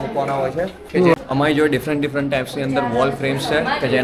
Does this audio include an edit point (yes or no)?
yes